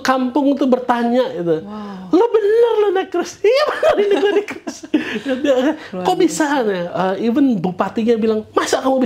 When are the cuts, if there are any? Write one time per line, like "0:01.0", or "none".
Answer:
none

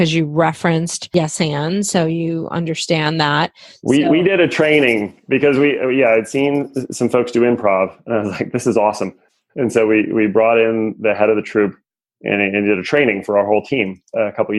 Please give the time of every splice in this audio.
none

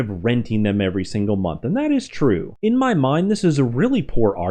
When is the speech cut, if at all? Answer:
0:02.5

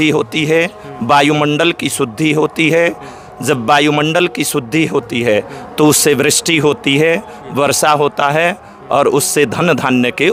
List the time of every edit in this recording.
none

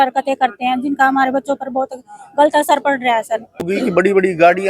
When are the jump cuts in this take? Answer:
0:03.7

